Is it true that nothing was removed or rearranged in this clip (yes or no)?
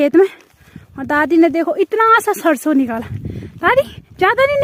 yes